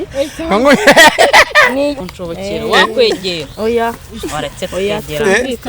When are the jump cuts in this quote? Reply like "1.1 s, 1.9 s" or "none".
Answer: 2.0 s